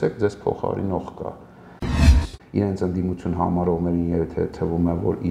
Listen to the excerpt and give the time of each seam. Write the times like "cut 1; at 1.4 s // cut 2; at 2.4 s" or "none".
cut 1; at 2.0 s